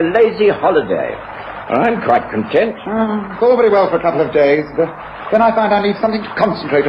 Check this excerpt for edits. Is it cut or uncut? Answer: uncut